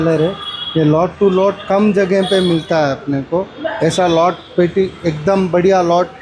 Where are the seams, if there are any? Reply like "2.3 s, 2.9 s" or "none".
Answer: none